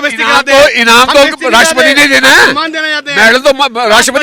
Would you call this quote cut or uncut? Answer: uncut